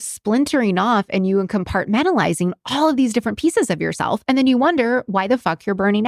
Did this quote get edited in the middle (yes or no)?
no